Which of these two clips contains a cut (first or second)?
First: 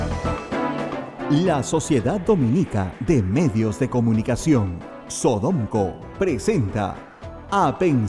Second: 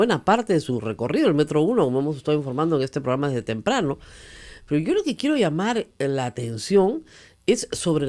first